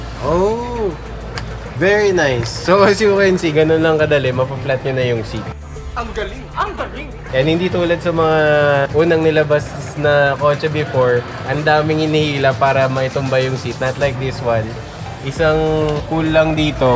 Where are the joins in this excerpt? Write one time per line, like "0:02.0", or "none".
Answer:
none